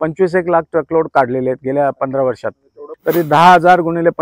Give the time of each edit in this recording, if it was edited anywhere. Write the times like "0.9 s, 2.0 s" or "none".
2.8 s